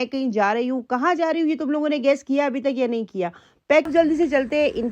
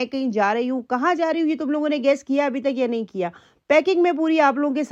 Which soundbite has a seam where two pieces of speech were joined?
first; 1 cut; at 3.9 s

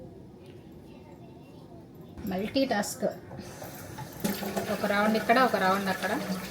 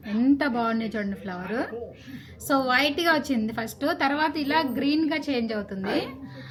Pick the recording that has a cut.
first; 1 cut; at 2.2 s

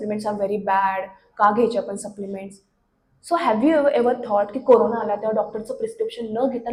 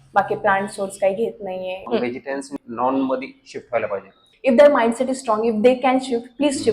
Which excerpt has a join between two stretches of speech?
second; 2 cuts; at 2.2 s, 4.3 s

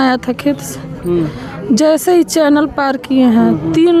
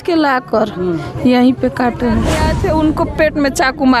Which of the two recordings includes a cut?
second; 1 cut; at 2.4 s

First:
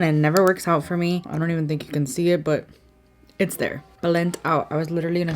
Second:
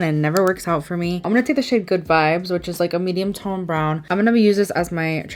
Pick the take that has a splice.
first; 2 cuts; at 1.2 s, 3.8 s

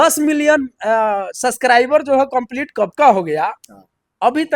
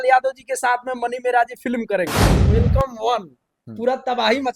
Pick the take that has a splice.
second; 1 cut; at 2.4 s

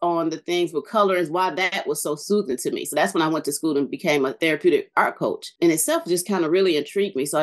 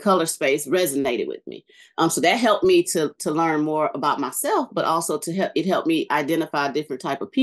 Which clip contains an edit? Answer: first; 2 cuts; at 4.4 s, 5.5 s

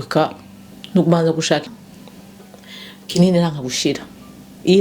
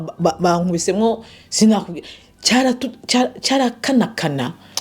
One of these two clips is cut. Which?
first; 1 cut; at 1.7 s

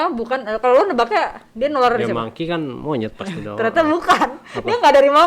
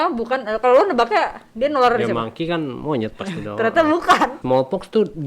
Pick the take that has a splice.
second; 1 cut; at 4.4 s

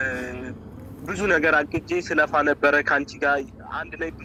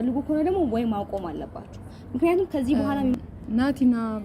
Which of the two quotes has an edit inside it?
second; 1 cut; at 3.2 s

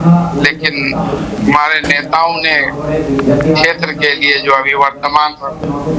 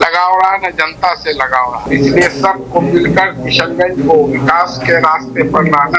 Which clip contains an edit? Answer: second; 1 cut; at 1.9 s

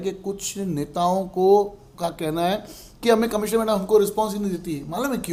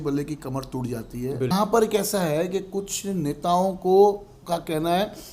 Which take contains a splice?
second; 1 cut; at 1.5 s

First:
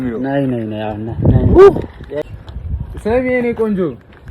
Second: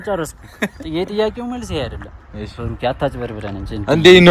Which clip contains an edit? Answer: first; 1 cut; at 2.3 s

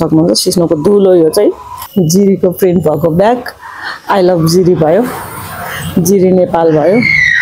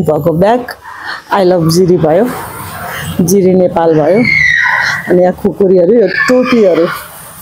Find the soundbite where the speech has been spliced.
first; 1 cut; at 1.8 s

